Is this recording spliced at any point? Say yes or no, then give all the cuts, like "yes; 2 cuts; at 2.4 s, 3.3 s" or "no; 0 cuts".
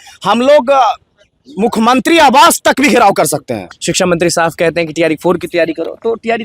yes; 1 cut; at 3.7 s